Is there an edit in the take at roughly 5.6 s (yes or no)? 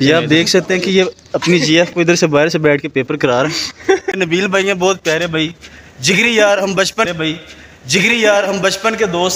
no